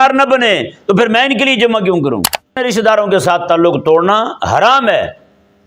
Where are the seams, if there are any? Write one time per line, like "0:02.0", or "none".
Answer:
0:02.6